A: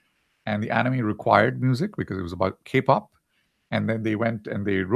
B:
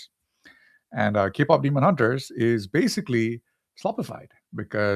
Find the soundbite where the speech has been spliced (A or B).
B